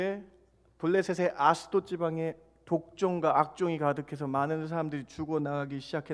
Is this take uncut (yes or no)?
yes